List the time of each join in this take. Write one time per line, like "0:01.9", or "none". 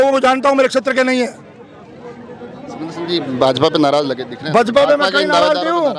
none